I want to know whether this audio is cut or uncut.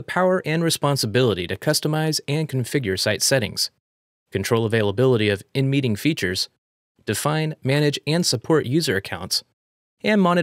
uncut